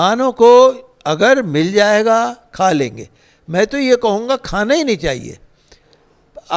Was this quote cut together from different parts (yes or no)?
no